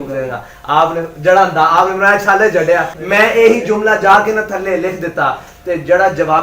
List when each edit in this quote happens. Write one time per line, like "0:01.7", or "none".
0:03.0